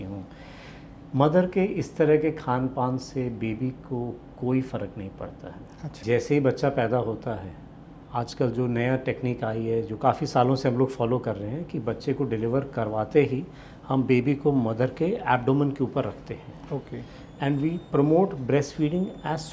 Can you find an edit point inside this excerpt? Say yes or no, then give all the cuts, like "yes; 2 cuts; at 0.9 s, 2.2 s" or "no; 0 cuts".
yes; 1 cut; at 6.0 s